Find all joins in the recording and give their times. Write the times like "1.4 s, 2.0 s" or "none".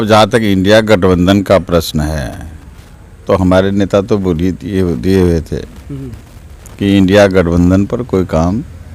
none